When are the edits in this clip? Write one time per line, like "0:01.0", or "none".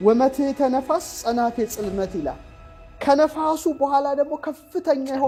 none